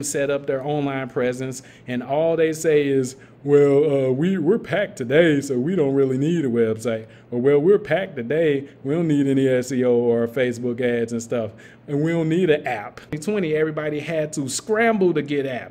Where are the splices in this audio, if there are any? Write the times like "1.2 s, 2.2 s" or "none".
13.2 s